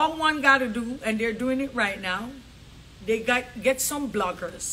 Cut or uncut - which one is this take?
uncut